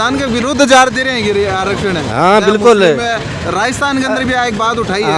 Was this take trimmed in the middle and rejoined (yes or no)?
no